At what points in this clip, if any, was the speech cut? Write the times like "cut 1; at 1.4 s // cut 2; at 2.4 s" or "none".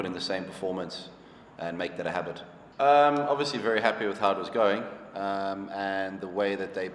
cut 1; at 2.7 s